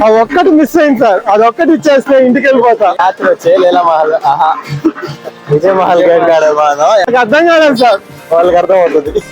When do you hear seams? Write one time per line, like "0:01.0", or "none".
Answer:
0:03.0
0:07.1